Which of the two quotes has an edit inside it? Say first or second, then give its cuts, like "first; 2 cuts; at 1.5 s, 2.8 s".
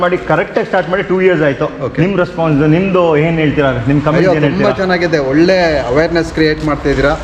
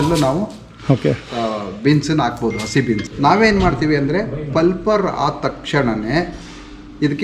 second; 1 cut; at 3.1 s